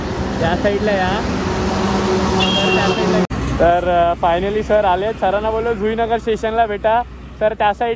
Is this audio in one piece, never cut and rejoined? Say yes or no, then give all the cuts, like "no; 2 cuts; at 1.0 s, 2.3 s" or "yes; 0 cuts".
no; 1 cut; at 3.3 s